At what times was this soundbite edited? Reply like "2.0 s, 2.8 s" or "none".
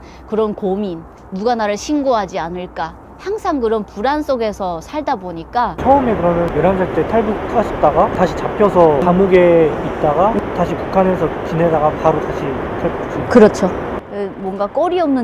5.8 s, 13.9 s